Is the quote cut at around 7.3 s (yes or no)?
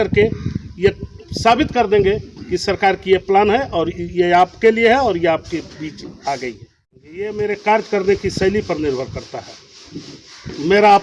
yes